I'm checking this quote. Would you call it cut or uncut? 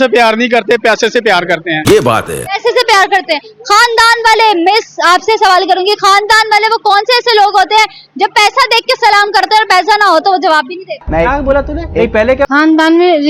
uncut